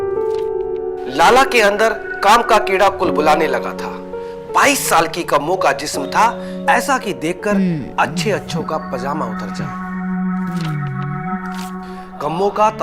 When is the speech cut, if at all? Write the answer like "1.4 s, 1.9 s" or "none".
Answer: none